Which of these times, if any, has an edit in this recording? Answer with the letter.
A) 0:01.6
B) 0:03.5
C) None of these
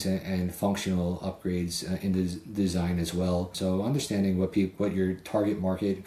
B